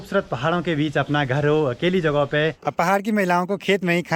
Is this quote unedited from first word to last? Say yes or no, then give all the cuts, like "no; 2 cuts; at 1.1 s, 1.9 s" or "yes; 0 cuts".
no; 1 cut; at 2.6 s